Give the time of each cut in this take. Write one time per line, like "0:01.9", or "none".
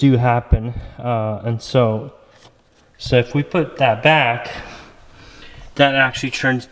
none